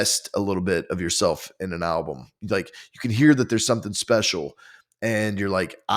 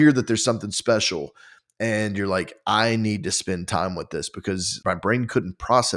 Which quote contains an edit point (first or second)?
second